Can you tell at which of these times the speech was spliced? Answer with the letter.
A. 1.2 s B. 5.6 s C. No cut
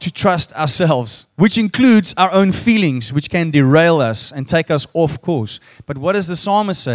A